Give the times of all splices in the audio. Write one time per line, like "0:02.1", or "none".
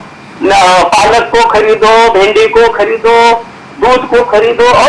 none